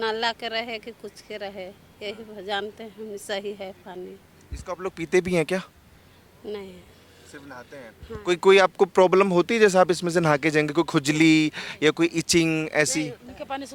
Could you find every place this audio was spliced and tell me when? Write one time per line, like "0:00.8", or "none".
none

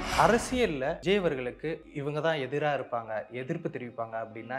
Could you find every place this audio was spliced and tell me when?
0:01.0
0:01.9

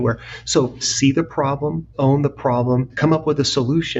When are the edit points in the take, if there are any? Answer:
0:00.9
0:01.9
0:02.9

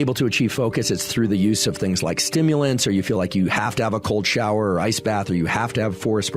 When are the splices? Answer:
none

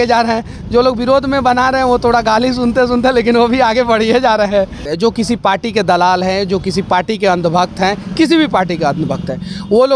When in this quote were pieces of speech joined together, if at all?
0:04.8

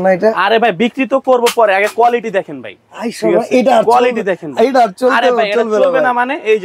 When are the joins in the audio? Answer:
none

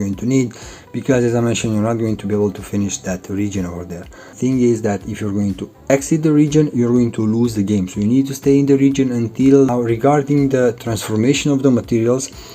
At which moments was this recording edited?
0:04.3
0:09.7

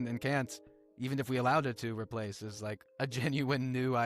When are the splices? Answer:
0:02.8

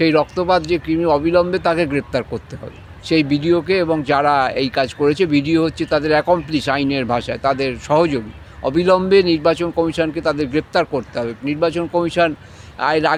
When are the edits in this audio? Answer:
none

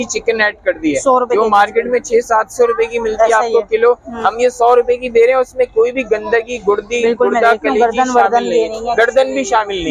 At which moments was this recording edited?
none

